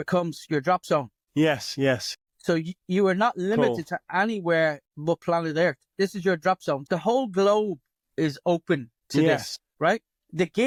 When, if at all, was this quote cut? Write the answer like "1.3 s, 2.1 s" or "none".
none